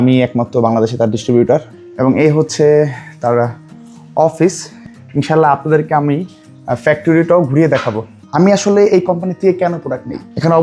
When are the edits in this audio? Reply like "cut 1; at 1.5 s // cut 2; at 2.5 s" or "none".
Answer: cut 1; at 1.7 s // cut 2; at 8.2 s